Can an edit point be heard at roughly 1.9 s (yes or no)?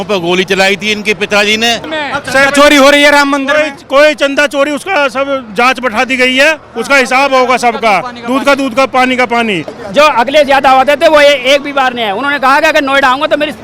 yes